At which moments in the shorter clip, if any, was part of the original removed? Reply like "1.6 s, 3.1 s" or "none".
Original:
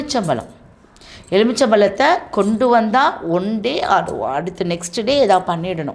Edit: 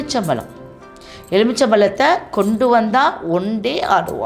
none